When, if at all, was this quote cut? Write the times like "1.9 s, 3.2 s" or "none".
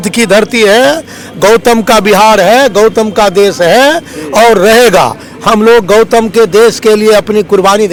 none